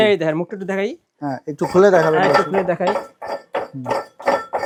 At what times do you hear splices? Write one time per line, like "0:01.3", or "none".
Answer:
none

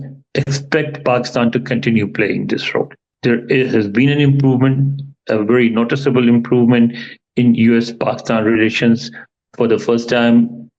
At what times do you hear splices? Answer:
0:03.1

